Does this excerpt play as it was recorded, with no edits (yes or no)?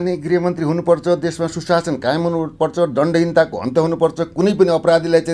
yes